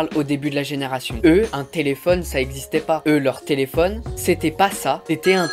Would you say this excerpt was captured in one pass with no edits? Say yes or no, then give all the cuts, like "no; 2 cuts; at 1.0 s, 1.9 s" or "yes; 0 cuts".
no; 1 cut; at 4.1 s